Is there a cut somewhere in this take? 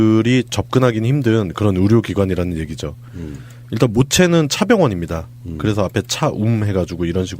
yes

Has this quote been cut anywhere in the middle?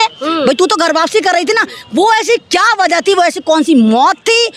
no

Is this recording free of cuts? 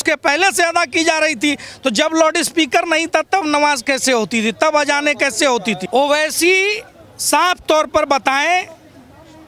yes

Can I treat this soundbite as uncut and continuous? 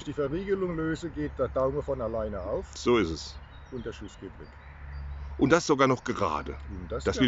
yes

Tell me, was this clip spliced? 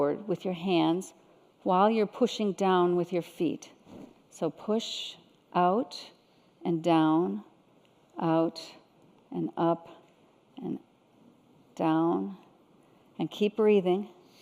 yes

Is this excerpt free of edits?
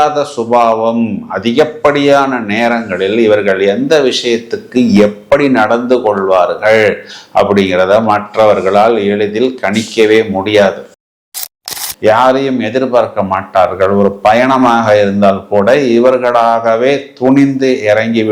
no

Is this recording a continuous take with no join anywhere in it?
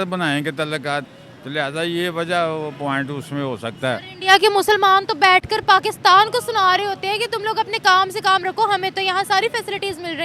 yes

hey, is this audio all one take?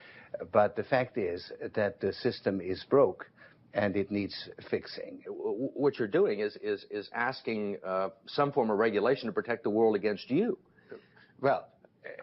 yes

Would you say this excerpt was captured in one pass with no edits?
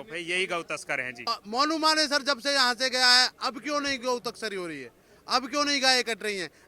no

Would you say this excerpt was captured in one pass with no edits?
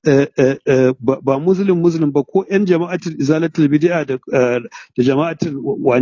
yes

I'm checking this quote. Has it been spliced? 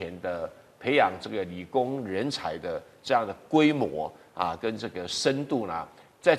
no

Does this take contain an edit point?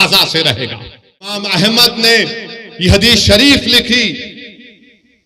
yes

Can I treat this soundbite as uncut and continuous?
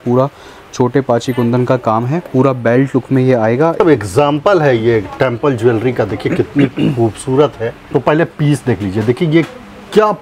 no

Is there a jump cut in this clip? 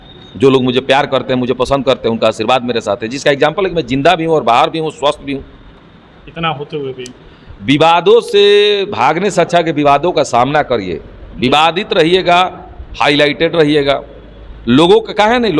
no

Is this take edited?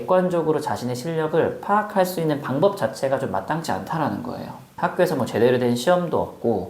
yes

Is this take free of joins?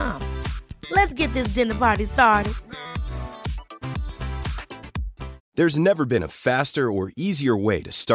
no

